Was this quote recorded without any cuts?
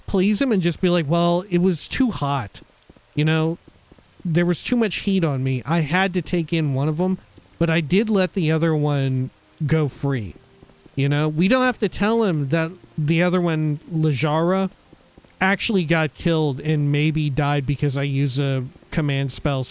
yes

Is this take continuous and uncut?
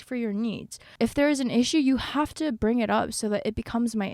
no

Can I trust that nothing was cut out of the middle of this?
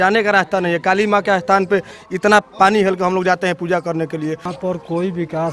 no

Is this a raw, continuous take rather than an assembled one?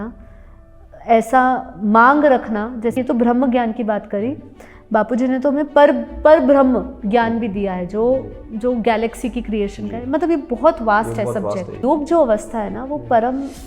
no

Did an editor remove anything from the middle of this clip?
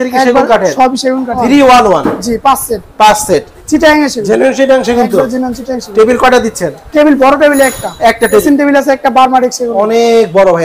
yes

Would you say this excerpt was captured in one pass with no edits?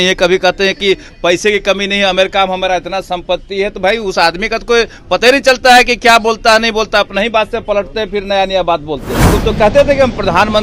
no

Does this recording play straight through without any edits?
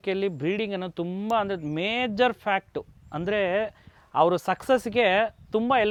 yes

